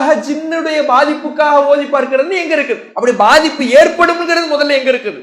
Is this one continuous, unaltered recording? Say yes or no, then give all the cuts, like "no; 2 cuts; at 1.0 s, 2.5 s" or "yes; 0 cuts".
yes; 0 cuts